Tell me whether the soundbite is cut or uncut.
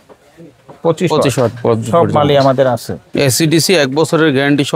cut